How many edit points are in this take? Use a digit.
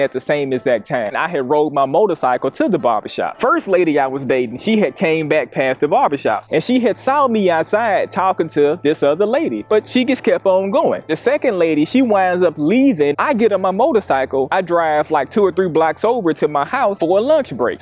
2